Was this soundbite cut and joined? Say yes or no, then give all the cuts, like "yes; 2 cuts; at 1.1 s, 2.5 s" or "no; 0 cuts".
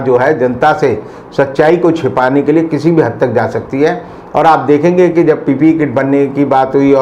no; 0 cuts